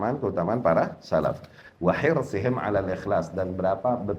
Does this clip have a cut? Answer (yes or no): no